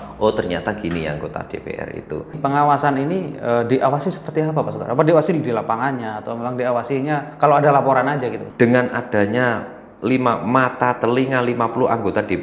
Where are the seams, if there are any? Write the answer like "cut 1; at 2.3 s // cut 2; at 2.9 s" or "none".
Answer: cut 1; at 2.4 s // cut 2; at 8.5 s